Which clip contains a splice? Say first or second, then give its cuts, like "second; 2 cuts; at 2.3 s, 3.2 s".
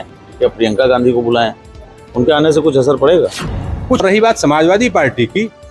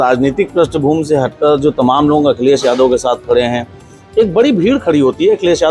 first; 1 cut; at 4.0 s